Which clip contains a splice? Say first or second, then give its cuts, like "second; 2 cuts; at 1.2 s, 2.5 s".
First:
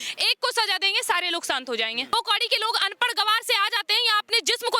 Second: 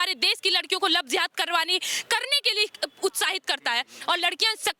first; 1 cut; at 2.1 s